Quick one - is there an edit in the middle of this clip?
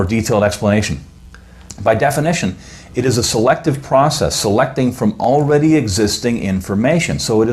yes; 1 cut; at 6.4 s

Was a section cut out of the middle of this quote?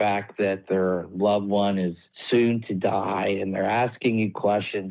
no; 0 cuts

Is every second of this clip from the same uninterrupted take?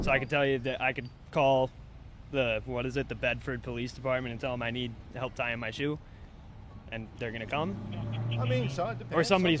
yes; 0 cuts

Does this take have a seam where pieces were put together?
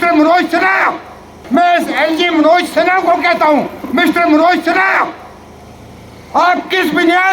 yes; 1 cut; at 1.3 s

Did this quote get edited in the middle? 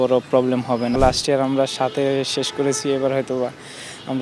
yes; 1 cut; at 1.0 s

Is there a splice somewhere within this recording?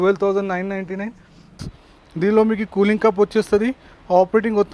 yes; 1 cut; at 1.6 s

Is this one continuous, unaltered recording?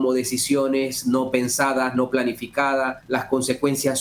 no; 1 cut; at 3.0 s

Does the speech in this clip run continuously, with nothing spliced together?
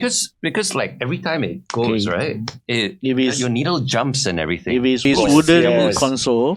no; 1 cut; at 5.0 s

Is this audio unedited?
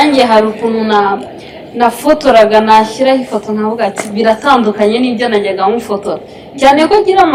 yes; 0 cuts

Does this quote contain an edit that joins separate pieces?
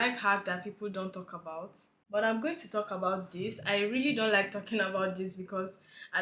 no; 0 cuts

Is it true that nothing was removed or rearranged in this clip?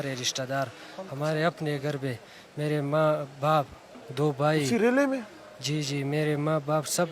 yes; 0 cuts

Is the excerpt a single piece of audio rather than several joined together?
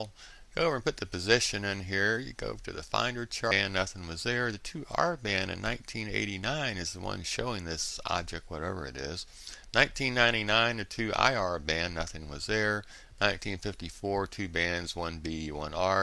yes; 0 cuts

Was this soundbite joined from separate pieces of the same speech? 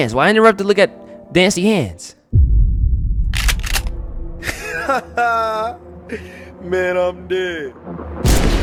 no; 0 cuts

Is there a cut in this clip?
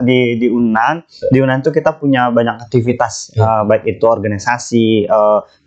no; 0 cuts

